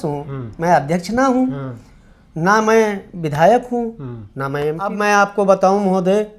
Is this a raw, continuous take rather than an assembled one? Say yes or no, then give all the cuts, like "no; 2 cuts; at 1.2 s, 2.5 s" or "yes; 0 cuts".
no; 1 cut; at 4.9 s